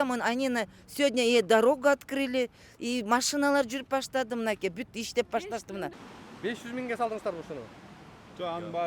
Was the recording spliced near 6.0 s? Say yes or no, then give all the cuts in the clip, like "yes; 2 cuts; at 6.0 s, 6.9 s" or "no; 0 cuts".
yes; 1 cut; at 6.0 s